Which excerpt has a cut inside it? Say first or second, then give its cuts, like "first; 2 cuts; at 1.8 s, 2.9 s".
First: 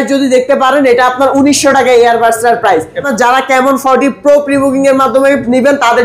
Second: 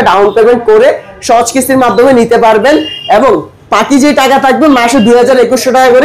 first; 1 cut; at 3.0 s